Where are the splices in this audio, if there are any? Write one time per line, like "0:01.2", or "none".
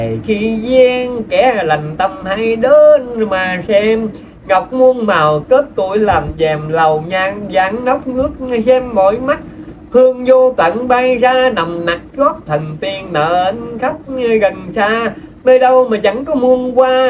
none